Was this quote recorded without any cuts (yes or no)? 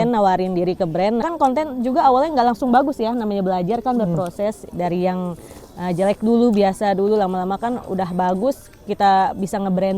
no